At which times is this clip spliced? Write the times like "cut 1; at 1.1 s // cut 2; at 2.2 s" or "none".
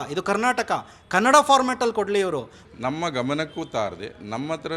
cut 1; at 2.5 s